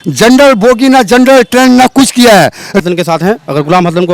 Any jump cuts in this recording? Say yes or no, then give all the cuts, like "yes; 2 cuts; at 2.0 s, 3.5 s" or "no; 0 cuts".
yes; 1 cut; at 2.8 s